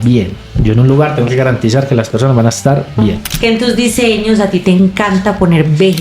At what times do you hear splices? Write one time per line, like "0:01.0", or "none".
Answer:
0:03.2